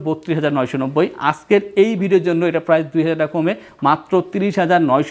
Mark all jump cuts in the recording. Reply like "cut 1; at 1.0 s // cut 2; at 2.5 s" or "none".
none